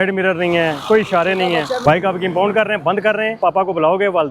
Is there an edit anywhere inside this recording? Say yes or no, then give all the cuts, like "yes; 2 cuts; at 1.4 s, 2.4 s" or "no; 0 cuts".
yes; 2 cuts; at 1.8 s, 3.3 s